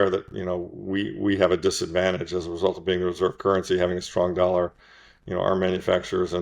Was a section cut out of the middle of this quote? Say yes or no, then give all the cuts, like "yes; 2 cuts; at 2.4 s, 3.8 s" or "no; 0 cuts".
no; 0 cuts